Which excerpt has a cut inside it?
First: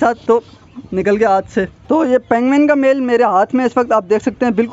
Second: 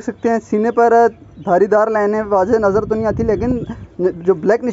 first; 1 cut; at 1.8 s

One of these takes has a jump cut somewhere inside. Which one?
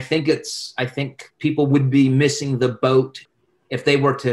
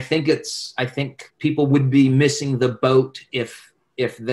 first; 1 cut; at 3.2 s

